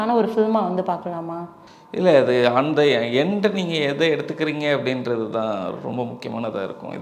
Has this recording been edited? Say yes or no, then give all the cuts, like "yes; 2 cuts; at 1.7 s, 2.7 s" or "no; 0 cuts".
no; 0 cuts